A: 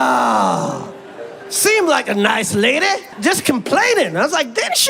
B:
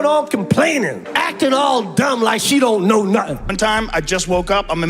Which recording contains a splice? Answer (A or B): B